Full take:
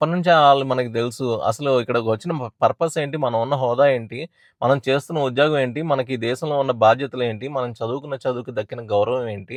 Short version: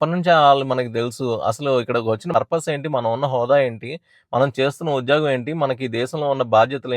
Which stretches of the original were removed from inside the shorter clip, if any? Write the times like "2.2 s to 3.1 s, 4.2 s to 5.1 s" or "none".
2.3 s to 2.5 s